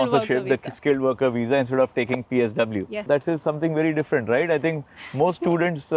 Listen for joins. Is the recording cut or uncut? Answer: uncut